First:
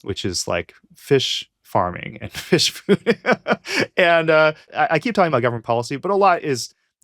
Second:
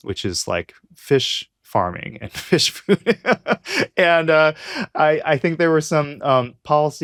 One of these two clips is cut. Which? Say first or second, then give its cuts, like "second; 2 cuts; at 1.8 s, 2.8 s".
first; 1 cut; at 4.7 s